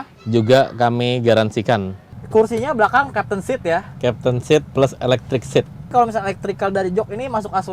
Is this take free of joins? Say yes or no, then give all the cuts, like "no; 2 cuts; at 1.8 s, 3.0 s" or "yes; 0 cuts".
no; 2 cuts; at 2.1 s, 5.9 s